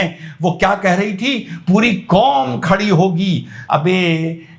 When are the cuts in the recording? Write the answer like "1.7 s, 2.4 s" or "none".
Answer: 3.5 s